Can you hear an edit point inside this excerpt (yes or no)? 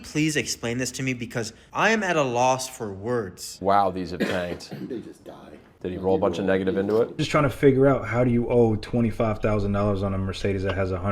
yes